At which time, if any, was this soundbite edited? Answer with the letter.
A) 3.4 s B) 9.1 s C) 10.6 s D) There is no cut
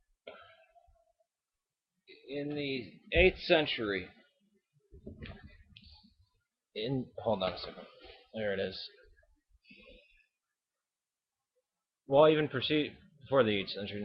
A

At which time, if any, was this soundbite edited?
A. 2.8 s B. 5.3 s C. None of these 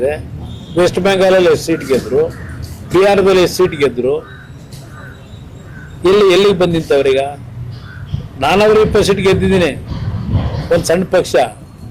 C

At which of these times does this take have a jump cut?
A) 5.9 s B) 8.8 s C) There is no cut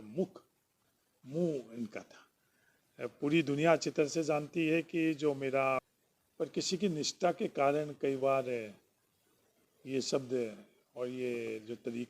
A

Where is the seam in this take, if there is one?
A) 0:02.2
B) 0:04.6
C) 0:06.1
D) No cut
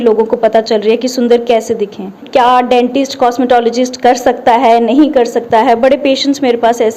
A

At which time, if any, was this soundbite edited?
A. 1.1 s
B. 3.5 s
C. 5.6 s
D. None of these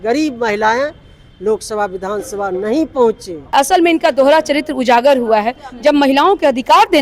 B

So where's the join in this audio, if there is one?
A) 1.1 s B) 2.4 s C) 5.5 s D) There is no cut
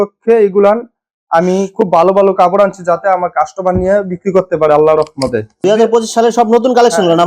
C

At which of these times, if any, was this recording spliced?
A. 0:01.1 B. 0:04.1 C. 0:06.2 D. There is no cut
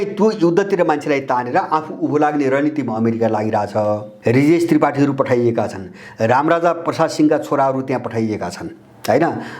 B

